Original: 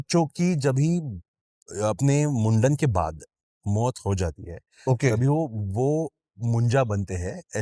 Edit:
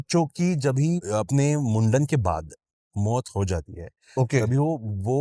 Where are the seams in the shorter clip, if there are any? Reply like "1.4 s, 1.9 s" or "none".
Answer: 1.0 s